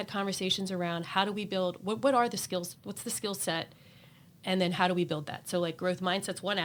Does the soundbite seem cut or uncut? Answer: uncut